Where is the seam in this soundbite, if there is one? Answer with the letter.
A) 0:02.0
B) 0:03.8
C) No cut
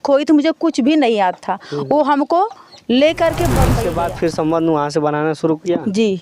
B